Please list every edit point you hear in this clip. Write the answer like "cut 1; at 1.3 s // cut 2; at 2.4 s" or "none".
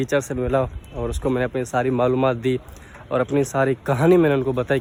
none